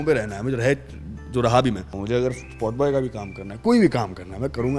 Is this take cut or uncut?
cut